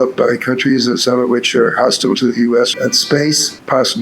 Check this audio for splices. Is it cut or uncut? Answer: cut